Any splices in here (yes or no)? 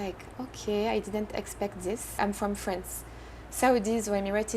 yes